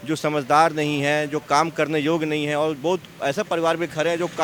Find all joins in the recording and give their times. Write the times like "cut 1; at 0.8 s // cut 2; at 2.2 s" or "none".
none